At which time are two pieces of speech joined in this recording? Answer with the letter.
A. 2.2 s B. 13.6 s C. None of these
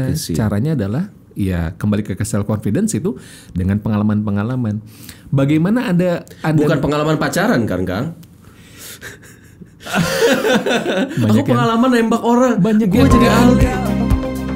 B